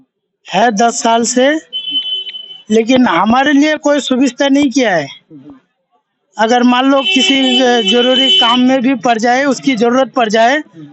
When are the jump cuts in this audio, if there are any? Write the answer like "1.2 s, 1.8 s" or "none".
none